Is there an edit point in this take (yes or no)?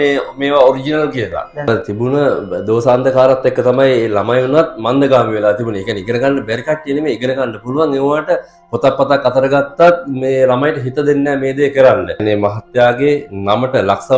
yes